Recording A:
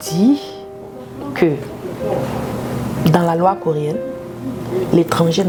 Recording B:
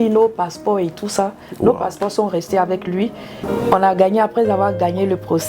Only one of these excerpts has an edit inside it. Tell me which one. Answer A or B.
B